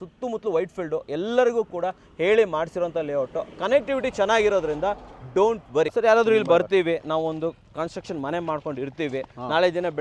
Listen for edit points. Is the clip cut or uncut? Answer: cut